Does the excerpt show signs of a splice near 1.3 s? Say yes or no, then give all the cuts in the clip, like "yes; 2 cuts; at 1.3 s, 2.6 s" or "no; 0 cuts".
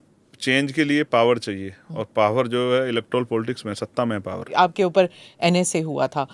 no; 1 cut; at 4.5 s